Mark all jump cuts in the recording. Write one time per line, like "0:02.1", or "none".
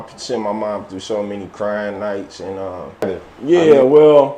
0:03.2